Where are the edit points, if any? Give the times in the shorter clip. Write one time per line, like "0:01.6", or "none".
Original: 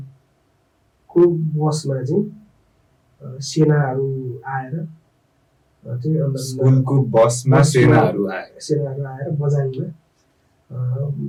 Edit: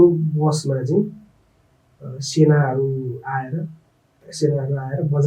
0:04.2

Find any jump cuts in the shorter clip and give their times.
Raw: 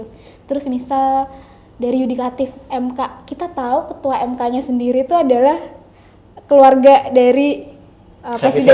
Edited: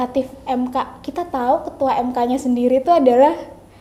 none

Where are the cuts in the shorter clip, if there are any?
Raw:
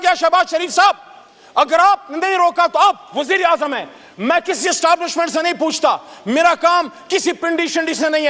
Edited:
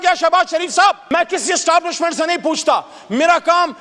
0:01.0

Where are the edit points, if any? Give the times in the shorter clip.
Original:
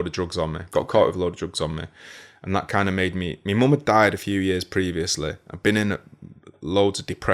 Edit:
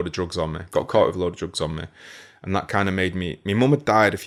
none

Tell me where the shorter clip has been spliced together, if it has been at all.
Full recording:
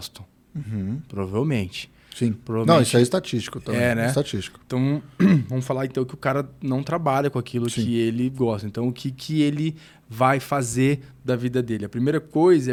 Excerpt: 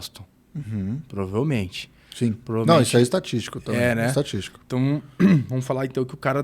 none

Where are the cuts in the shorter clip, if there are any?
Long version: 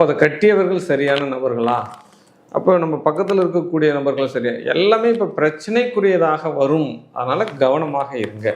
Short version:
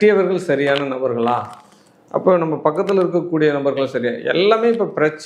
none

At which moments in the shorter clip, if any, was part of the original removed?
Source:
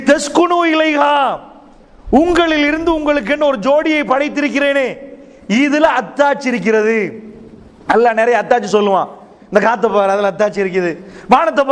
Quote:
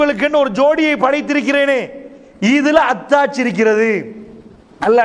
none

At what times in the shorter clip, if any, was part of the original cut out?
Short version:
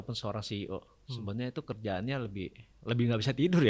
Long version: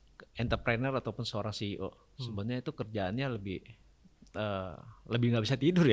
0:02.7

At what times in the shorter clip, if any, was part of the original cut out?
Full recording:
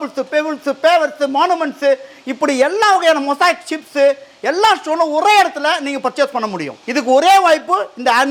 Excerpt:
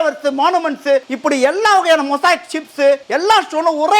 0:01.1
0:03.0

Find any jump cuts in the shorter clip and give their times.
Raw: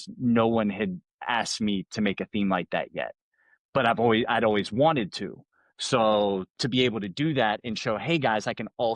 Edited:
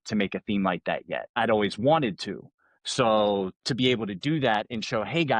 0:01.3

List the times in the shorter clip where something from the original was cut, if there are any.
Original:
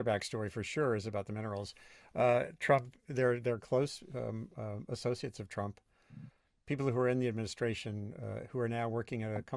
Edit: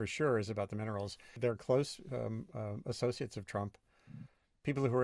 0:01.4

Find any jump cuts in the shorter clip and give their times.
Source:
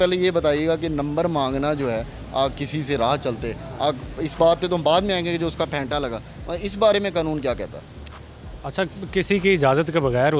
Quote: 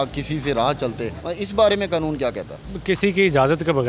0:01.2
0:02.7

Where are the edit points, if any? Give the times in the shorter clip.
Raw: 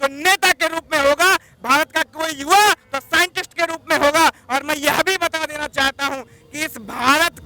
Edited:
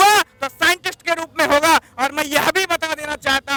none

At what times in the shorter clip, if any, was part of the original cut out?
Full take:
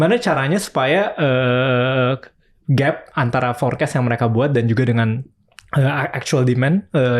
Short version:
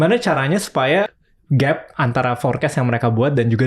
0:01.1

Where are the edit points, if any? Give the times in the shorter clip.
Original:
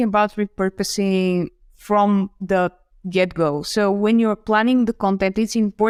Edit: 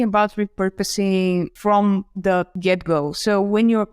0:01.5
0:02.5

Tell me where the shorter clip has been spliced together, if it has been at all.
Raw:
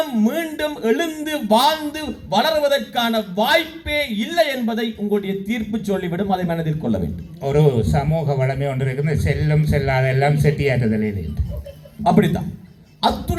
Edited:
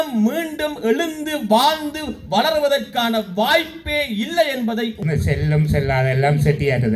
0:05.0

